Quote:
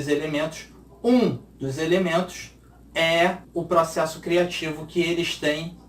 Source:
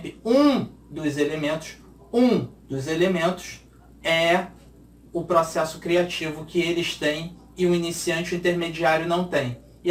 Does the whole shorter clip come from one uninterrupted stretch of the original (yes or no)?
no